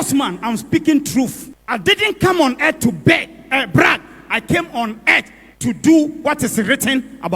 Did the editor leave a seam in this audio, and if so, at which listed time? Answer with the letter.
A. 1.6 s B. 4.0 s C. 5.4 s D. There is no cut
A